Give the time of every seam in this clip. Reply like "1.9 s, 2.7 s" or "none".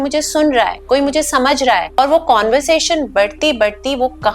2.0 s